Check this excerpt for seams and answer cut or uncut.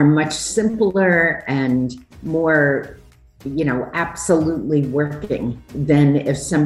cut